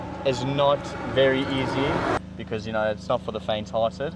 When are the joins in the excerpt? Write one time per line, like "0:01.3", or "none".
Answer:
0:02.2